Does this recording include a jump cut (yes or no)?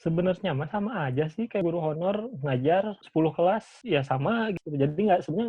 yes